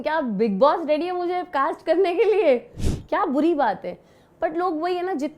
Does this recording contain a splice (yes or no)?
yes